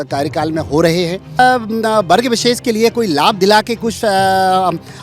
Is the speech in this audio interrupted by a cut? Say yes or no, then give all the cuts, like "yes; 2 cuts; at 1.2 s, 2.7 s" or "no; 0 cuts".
yes; 1 cut; at 1.4 s